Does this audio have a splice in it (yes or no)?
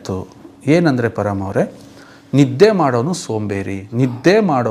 no